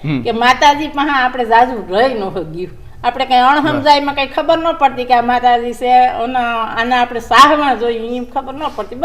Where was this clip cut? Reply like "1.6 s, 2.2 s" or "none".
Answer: none